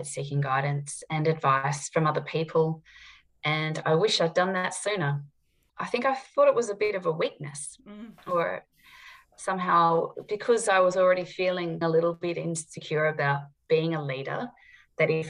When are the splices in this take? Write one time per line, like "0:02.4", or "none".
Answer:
0:05.6
0:11.8

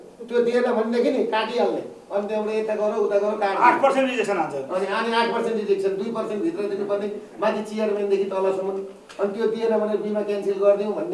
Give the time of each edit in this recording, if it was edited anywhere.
none

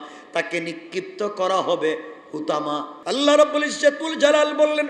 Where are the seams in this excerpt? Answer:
0:02.9

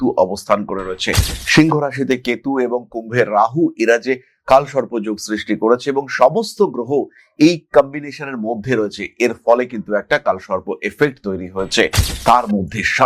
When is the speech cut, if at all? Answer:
none

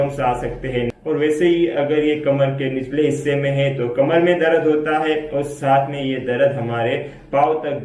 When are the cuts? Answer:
0:01.0

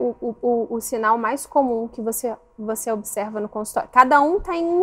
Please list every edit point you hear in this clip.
none

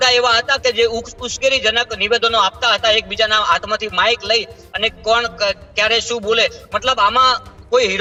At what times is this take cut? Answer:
none

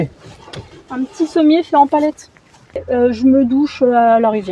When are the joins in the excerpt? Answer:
0:02.8

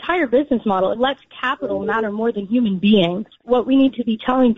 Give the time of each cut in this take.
0:00.9
0:03.4

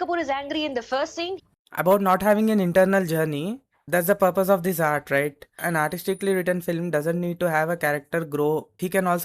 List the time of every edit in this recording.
0:01.5

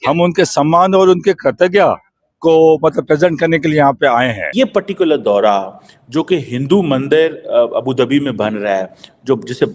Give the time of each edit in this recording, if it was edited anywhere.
0:04.5

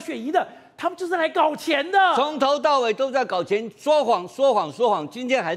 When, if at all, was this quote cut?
none

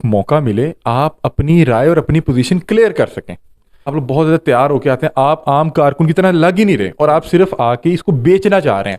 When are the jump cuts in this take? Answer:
0:03.9

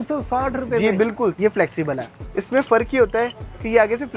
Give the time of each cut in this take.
0:01.4
0:02.2

